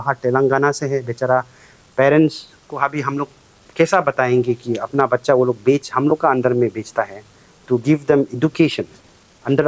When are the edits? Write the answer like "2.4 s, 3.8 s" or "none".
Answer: none